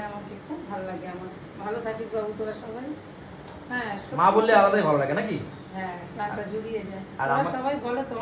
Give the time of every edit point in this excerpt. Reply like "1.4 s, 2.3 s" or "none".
none